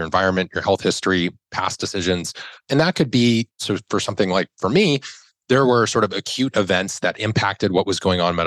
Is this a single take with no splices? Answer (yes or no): yes